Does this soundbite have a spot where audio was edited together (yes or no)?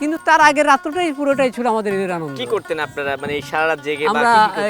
no